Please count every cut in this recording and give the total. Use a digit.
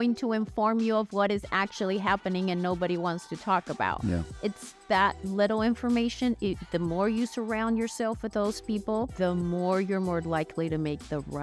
2